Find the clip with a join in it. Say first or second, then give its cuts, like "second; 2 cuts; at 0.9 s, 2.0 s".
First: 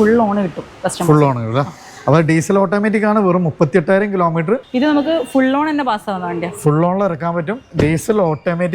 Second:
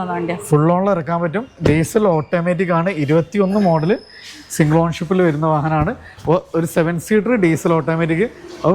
first; 1 cut; at 4.7 s